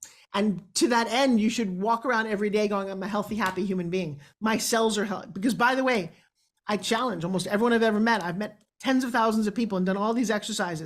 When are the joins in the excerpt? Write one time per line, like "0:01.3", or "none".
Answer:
none